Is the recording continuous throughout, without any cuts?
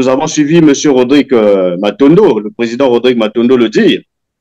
yes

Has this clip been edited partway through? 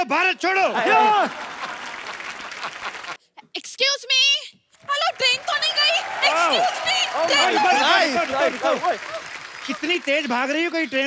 yes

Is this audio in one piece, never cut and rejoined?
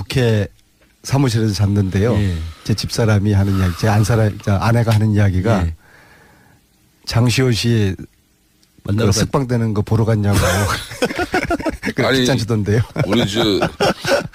yes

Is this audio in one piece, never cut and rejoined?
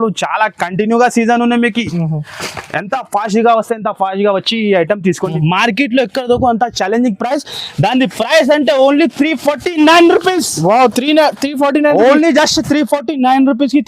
no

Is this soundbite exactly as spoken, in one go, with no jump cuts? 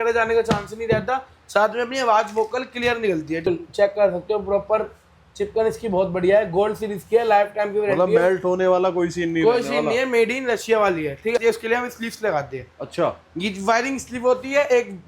no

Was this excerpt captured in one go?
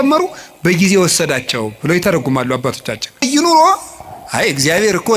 no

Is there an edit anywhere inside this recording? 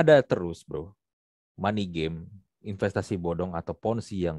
no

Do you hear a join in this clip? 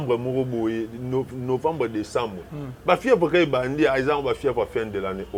no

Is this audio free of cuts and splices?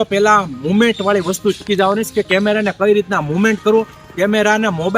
yes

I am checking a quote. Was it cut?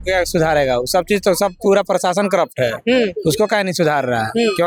no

